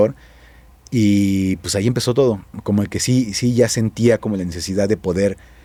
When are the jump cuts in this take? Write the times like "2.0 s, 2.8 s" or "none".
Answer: none